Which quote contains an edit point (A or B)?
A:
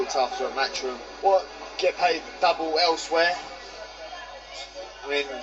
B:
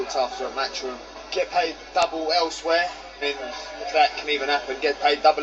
B